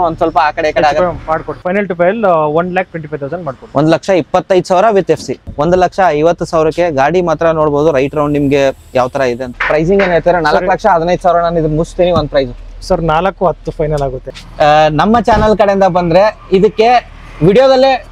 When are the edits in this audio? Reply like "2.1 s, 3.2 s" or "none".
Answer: 1.5 s, 5.4 s, 9.4 s, 14.2 s